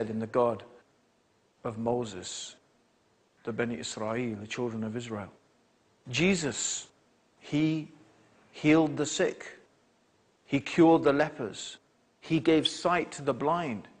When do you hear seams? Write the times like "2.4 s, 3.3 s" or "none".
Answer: 12.9 s